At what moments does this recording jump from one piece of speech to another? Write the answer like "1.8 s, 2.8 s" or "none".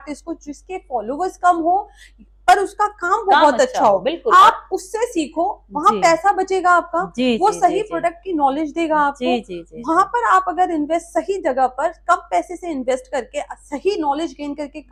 none